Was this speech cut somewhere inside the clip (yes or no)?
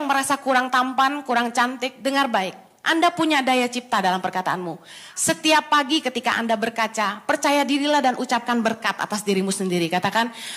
no